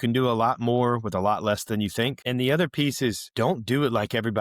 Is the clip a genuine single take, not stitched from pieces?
no; 2 cuts; at 2.2 s, 3.2 s

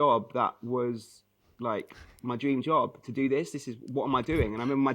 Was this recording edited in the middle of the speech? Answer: no; 0 cuts

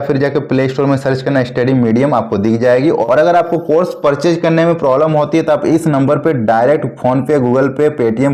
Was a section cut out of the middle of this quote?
yes; 1 cut; at 3.0 s

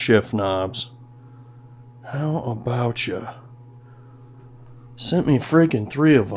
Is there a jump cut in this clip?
no; 0 cuts

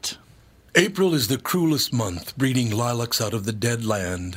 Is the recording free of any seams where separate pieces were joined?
yes; 0 cuts

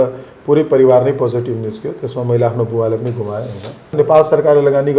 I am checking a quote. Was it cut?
yes; 1 cut; at 3.9 s

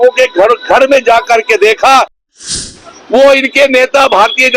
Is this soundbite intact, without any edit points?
no; 1 cut; at 2.4 s

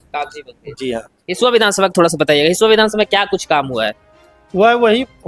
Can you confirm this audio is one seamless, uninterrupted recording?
yes; 0 cuts

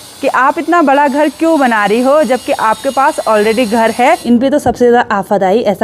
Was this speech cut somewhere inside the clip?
yes; 1 cut; at 4.2 s

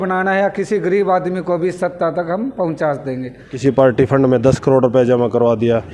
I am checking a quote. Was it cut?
yes; 1 cut; at 3.5 s

